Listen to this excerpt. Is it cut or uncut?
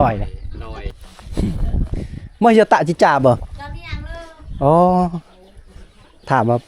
cut